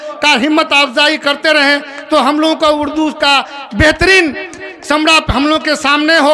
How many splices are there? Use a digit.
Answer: 0